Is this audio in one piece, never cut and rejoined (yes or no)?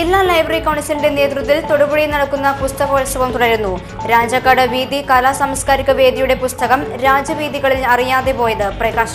yes